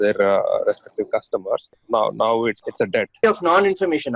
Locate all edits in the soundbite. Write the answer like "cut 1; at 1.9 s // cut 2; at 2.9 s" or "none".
cut 1; at 3.2 s